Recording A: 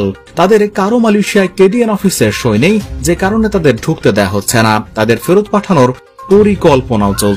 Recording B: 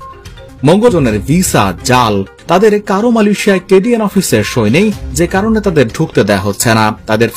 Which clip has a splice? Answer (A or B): B